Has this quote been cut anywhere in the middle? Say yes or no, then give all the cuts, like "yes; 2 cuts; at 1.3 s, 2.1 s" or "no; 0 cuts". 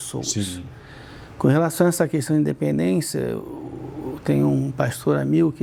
no; 0 cuts